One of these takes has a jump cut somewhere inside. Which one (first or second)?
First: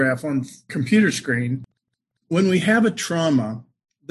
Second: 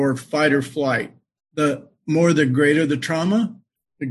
first